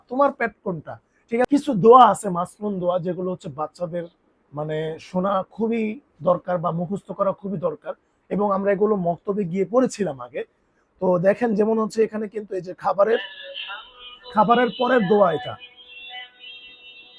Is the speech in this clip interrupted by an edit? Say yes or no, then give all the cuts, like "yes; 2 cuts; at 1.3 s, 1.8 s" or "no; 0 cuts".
yes; 1 cut; at 1.5 s